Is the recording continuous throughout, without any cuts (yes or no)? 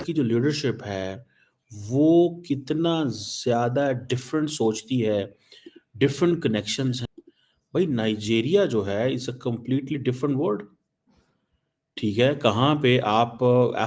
no